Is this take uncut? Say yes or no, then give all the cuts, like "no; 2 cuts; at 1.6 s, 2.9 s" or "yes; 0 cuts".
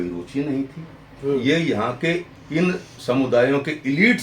no; 1 cut; at 2.3 s